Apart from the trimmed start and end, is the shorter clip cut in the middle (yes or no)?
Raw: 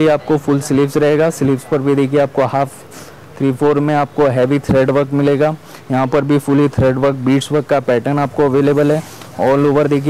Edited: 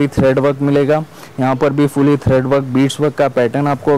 no